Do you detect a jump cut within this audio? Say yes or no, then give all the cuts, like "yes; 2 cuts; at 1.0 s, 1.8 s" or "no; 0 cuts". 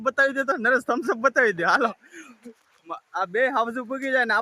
yes; 1 cut; at 1.4 s